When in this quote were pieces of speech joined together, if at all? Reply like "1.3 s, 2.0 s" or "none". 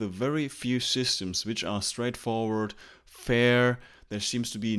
none

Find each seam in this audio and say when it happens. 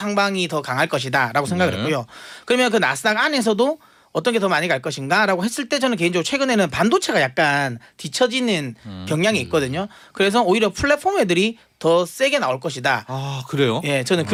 none

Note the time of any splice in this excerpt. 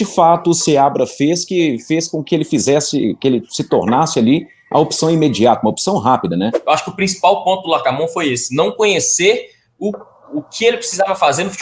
6.6 s

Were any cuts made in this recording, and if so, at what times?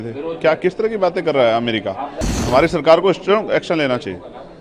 2.4 s

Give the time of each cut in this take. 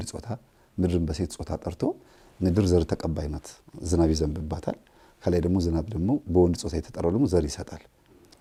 none

